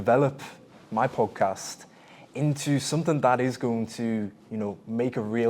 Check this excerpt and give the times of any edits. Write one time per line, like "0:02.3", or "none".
none